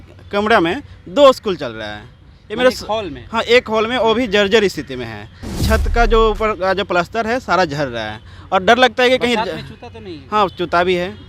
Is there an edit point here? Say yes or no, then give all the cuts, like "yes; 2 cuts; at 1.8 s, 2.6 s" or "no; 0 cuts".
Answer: no; 0 cuts